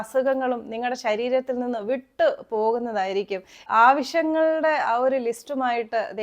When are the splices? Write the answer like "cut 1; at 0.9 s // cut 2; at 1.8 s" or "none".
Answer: cut 1; at 3.6 s